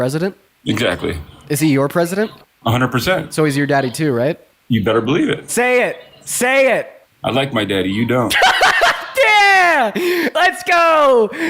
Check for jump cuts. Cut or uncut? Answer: cut